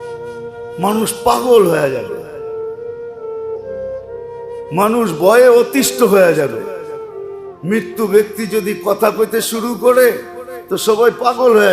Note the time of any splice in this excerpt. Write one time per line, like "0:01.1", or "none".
0:02.2
0:04.0